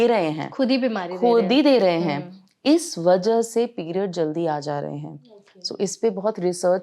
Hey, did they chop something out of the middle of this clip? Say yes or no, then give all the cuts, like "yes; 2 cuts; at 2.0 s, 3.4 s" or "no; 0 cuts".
no; 0 cuts